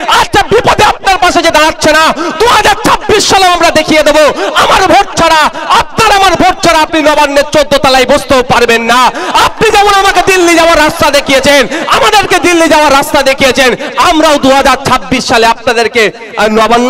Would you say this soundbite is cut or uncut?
uncut